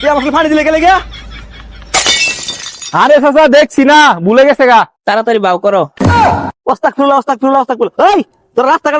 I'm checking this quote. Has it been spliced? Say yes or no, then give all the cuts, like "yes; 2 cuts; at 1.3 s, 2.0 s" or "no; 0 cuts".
yes; 1 cut; at 5.0 s